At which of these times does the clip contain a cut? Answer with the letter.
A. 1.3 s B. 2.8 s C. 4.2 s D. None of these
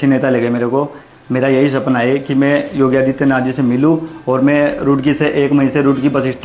D